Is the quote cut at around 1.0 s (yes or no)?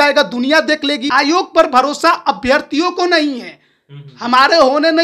yes